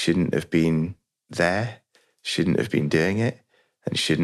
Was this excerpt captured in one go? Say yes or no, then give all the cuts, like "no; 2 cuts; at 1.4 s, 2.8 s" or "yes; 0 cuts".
yes; 0 cuts